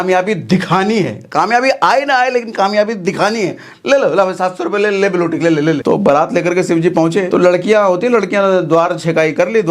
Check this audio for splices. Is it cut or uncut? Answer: cut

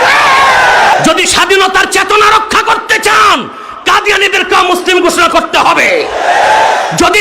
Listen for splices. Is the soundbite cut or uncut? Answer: cut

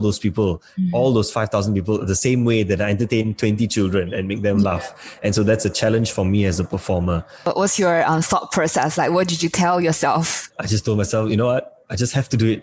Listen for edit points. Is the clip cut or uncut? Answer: uncut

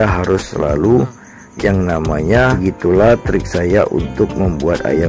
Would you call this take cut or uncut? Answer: cut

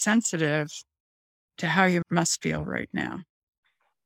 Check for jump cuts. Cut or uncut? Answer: cut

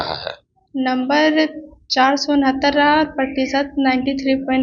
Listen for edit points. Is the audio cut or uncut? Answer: uncut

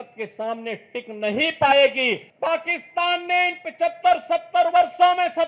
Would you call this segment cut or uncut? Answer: cut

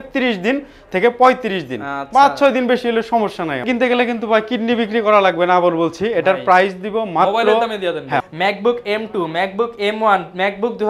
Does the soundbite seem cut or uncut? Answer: cut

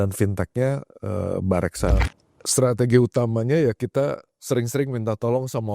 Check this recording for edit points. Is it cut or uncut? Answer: cut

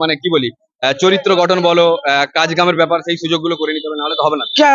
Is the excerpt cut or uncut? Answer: uncut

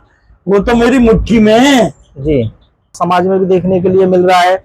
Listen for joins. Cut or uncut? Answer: cut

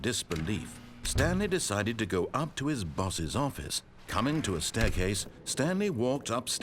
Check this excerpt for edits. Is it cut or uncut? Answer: cut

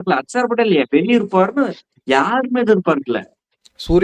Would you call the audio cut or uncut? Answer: uncut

